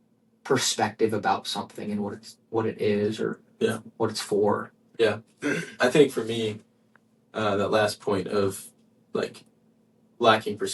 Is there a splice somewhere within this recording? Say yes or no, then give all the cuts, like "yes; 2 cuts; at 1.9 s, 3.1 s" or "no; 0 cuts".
no; 0 cuts